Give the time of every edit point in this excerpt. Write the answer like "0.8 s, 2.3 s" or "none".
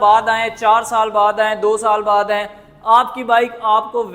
none